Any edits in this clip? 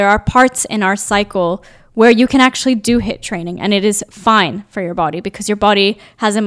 no; 0 cuts

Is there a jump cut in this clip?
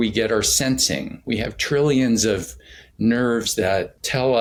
no; 0 cuts

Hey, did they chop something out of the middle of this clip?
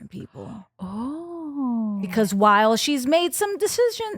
yes; 1 cut; at 2.0 s

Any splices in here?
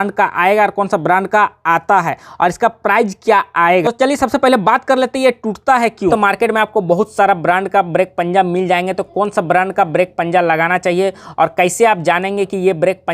yes; 2 cuts; at 3.8 s, 6.1 s

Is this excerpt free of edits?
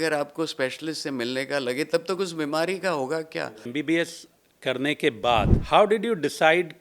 no; 2 cuts; at 3.7 s, 5.6 s

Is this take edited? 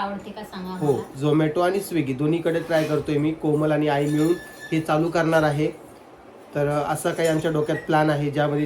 no; 0 cuts

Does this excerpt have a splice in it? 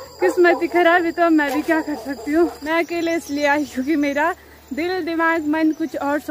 yes; 1 cut; at 2.6 s

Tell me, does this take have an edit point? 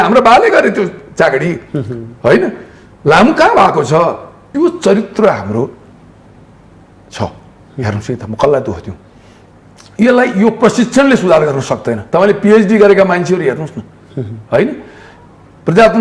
yes; 1 cut; at 4.5 s

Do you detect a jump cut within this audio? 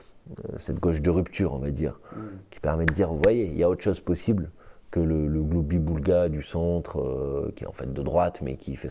no; 0 cuts

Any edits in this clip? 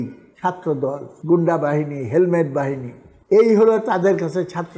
yes; 1 cut; at 1.1 s

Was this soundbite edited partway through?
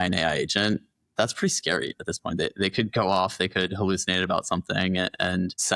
no; 0 cuts

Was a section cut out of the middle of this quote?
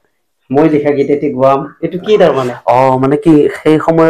no; 0 cuts

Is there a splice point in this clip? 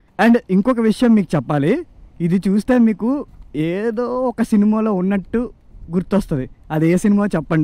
no; 0 cuts

